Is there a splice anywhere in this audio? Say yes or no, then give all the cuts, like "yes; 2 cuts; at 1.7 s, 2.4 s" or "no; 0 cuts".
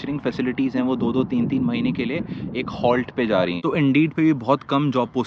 yes; 1 cut; at 3.6 s